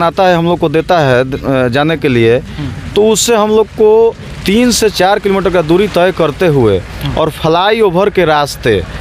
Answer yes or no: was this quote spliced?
no